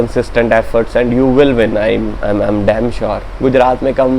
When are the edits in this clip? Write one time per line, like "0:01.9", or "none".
0:03.3